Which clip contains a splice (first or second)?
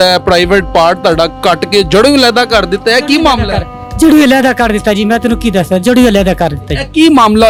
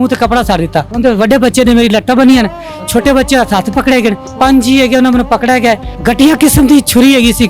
second